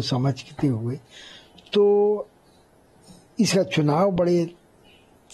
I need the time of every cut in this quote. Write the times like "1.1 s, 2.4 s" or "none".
none